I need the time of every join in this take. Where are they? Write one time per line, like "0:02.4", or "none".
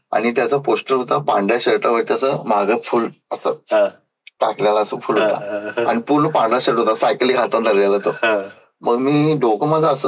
none